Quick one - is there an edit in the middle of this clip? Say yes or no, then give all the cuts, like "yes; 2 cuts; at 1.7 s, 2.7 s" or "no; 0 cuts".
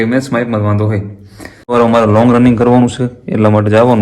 yes; 1 cut; at 1.7 s